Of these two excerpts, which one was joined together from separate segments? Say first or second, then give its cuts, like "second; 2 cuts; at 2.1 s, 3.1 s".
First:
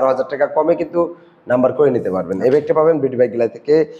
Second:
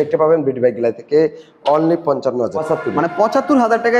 second; 1 cut; at 2.6 s